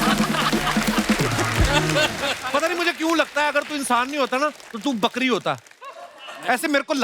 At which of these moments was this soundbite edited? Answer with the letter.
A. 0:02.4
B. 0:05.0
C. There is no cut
A